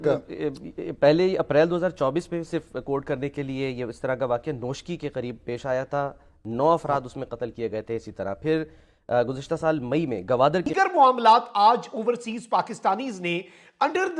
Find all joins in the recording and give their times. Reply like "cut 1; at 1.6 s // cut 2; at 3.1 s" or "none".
cut 1; at 10.7 s